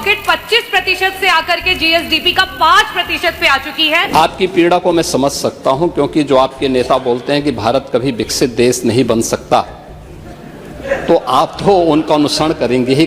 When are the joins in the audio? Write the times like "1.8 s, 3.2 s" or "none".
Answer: 4.1 s